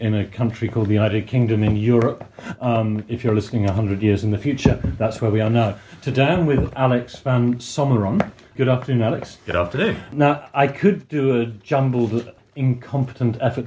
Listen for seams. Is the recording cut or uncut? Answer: cut